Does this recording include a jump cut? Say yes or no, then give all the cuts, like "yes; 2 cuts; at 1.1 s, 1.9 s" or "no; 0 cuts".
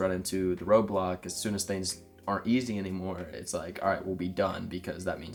no; 0 cuts